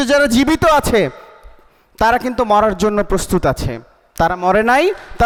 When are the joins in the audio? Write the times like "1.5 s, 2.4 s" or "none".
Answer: none